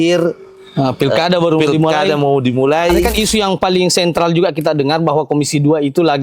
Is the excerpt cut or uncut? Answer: cut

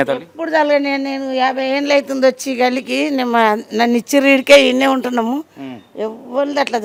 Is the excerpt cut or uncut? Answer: uncut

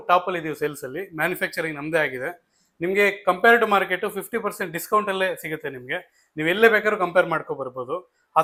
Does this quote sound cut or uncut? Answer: uncut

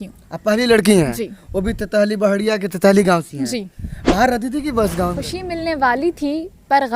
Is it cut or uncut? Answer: cut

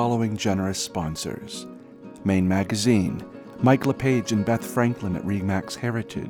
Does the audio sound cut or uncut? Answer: uncut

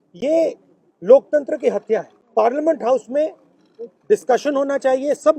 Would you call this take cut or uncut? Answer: cut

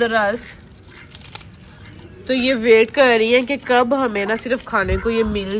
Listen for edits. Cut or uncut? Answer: uncut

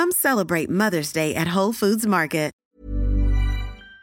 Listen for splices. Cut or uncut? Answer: cut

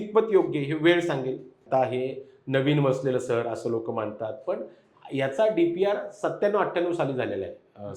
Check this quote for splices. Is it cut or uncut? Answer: cut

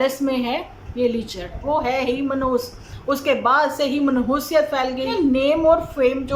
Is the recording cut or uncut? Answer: cut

